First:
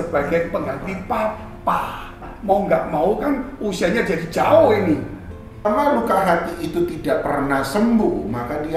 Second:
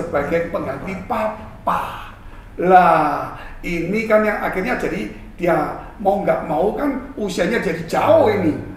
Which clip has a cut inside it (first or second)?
first